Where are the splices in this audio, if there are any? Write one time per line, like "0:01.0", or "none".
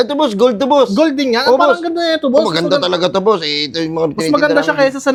none